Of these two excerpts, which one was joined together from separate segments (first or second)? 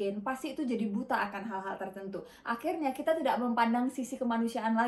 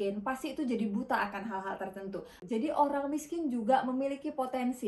second